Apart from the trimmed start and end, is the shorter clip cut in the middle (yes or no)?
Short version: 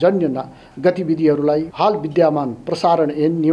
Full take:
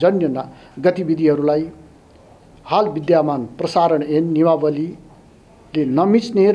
yes